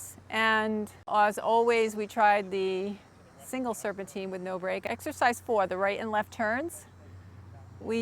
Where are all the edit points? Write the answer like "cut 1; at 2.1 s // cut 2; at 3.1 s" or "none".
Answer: cut 1; at 1.0 s // cut 2; at 4.8 s